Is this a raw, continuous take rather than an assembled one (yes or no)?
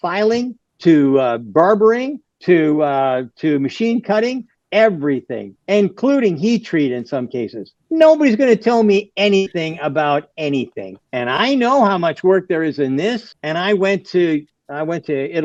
yes